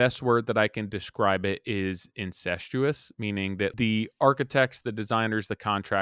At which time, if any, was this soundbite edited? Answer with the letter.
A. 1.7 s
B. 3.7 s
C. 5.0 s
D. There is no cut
B